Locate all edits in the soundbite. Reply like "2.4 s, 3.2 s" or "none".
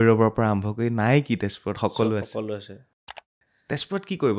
3.1 s